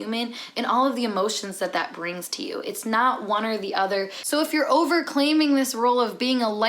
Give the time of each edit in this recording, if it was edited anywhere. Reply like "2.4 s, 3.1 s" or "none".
4.2 s